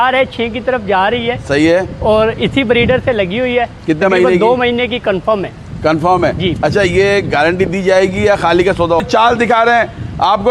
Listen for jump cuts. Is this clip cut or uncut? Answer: cut